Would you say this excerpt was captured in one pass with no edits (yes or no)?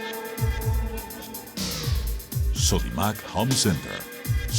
no